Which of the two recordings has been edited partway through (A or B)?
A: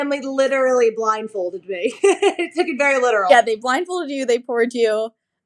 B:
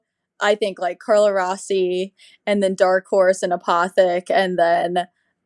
A